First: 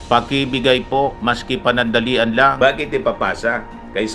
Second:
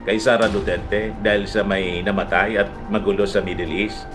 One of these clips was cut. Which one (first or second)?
first